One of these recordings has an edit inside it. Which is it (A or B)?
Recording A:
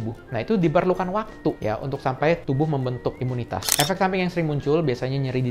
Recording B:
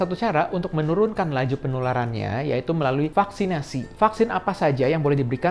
A